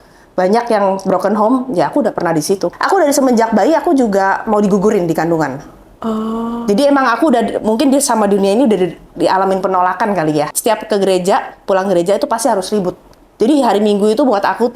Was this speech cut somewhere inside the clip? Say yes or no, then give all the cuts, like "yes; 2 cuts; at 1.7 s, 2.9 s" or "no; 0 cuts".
yes; 2 cuts; at 2.7 s, 10.5 s